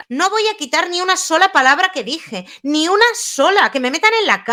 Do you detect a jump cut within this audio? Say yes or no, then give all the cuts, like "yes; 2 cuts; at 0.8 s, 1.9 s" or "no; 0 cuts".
no; 0 cuts